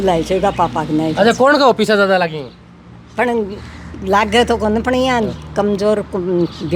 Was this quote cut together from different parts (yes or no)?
no